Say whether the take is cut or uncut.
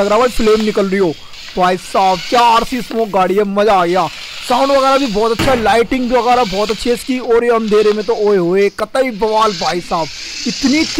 uncut